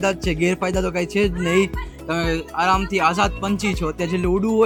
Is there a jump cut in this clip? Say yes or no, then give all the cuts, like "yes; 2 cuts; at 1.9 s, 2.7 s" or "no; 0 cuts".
no; 0 cuts